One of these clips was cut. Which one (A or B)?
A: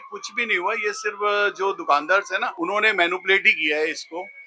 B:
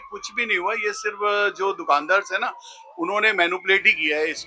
A